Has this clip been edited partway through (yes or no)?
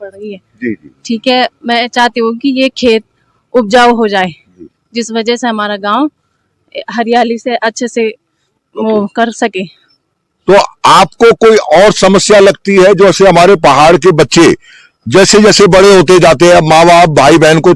no